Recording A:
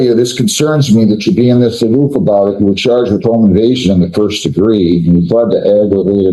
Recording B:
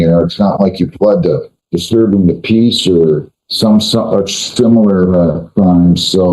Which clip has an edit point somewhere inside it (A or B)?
B